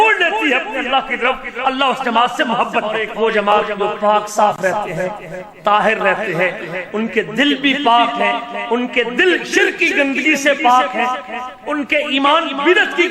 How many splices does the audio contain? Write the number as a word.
one